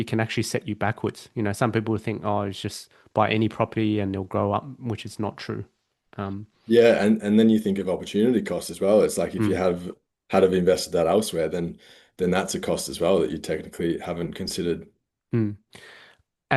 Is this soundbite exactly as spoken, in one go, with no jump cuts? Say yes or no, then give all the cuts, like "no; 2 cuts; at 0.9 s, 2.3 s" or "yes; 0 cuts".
yes; 0 cuts